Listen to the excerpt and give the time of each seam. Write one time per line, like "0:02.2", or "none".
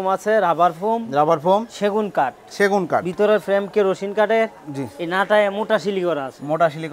none